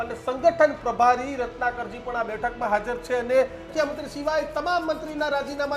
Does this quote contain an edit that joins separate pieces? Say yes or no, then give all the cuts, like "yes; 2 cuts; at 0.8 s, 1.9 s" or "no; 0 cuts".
yes; 1 cut; at 3.7 s